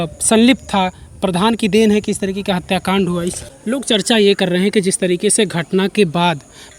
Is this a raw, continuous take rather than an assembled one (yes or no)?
no